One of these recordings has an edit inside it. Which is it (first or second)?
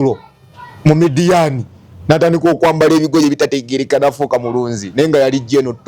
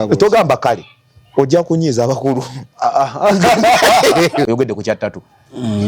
second